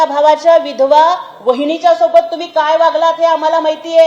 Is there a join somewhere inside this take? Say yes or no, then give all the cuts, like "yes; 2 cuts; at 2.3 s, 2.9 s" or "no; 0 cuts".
no; 0 cuts